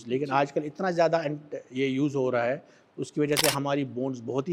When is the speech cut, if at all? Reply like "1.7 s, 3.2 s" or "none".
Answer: none

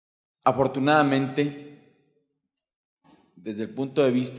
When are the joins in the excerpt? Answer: 1.2 s

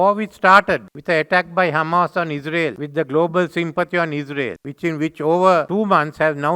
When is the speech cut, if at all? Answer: 0.9 s, 2.8 s, 4.6 s, 5.7 s

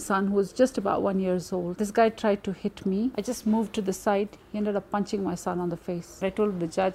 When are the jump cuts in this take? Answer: 1.7 s, 6.1 s

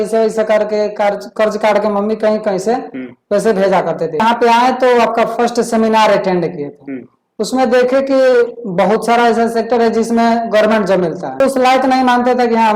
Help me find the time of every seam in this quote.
4.2 s, 11.4 s

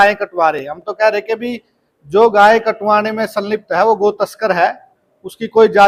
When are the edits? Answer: none

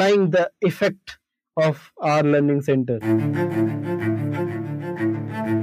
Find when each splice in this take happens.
3.0 s

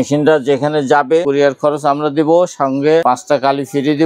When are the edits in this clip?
1.2 s, 3.0 s

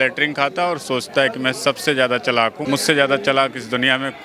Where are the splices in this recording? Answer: 2.6 s

